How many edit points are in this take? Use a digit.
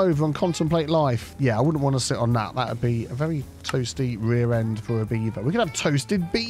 1